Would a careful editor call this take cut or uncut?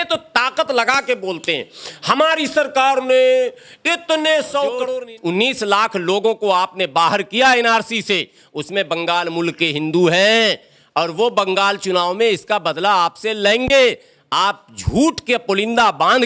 cut